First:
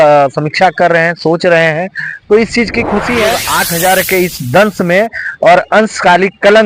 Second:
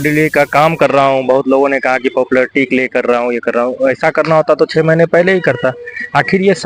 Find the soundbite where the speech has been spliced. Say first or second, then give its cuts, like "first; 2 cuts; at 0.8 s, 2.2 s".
first; 1 cut; at 3.5 s